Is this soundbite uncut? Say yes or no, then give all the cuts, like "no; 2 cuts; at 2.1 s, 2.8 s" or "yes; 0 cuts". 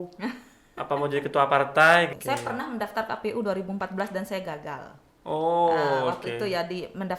no; 1 cut; at 2.1 s